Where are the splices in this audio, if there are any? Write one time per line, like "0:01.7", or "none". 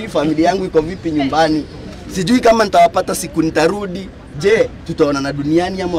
none